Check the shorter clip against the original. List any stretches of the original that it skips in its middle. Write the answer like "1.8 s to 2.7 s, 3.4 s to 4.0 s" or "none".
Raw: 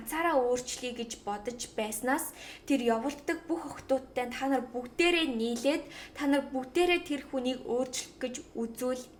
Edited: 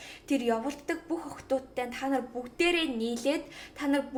none